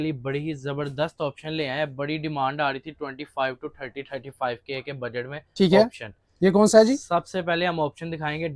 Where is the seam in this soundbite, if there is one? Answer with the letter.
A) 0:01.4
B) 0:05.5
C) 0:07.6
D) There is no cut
D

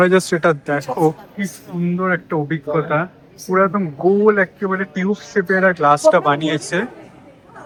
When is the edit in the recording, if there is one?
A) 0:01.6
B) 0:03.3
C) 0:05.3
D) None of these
D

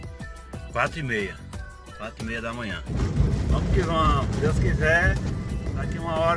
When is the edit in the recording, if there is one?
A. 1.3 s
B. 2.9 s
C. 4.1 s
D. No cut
B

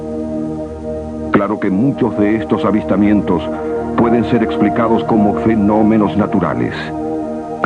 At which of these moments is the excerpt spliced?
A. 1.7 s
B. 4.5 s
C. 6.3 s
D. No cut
B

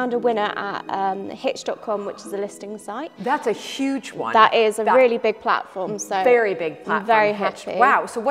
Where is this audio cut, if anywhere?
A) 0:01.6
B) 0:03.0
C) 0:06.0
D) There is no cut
D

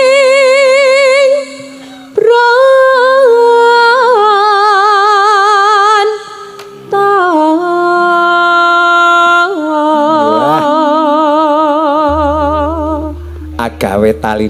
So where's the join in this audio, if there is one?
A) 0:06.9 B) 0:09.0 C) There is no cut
C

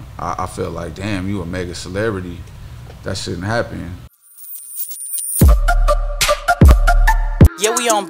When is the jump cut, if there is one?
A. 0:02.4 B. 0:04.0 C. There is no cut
B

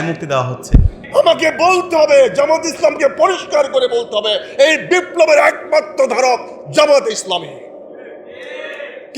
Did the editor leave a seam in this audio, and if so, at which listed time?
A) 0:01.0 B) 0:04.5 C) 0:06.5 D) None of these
A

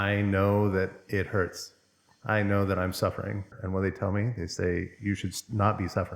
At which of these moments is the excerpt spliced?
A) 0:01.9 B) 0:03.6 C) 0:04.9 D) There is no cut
B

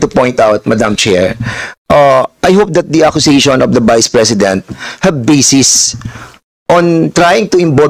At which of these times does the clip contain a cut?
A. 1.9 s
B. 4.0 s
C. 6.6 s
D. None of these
D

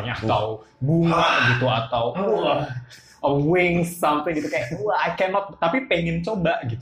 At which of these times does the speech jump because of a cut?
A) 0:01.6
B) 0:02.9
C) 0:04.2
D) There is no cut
D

